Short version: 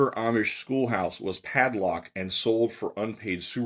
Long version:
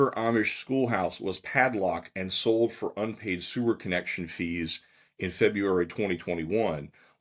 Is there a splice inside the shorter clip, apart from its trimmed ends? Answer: no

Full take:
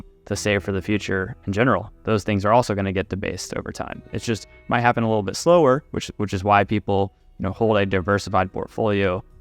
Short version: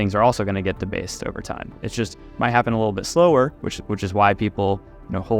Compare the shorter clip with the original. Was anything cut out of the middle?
no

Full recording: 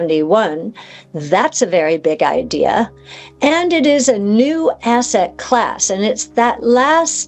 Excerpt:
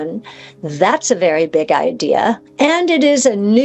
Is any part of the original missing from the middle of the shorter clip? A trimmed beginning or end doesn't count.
yes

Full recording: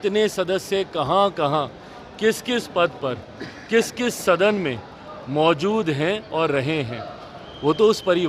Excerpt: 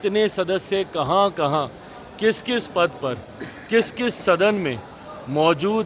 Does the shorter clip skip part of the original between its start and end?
no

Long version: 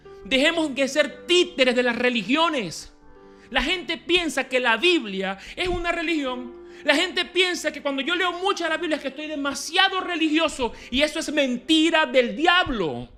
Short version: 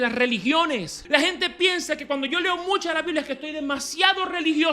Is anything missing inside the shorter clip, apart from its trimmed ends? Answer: yes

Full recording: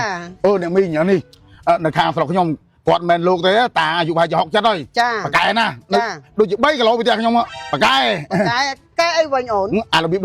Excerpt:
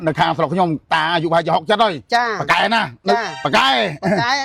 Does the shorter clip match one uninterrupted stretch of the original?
no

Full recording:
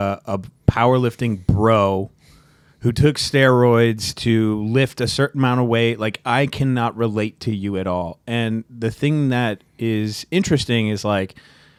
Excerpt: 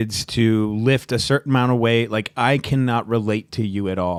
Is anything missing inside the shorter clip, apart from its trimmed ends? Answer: no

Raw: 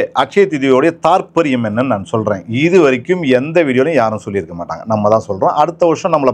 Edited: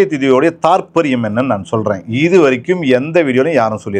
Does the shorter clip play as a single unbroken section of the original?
yes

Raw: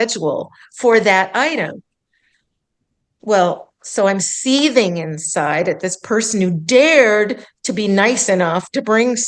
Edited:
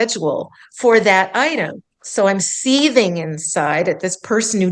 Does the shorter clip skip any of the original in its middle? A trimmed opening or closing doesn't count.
yes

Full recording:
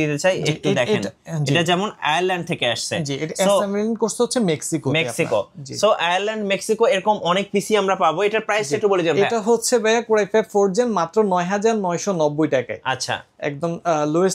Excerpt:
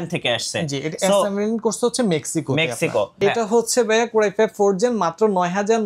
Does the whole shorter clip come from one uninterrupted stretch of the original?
no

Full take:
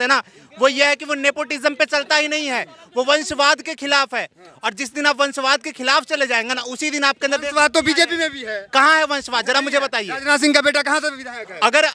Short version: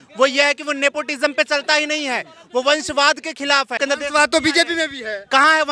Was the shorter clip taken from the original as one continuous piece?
no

